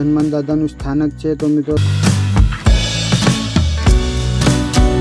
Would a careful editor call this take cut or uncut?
cut